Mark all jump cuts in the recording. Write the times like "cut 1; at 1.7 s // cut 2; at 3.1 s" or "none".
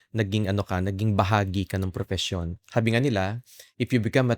cut 1; at 2.5 s